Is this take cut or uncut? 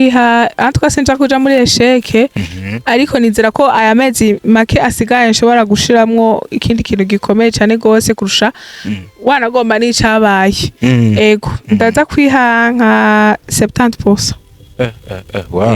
uncut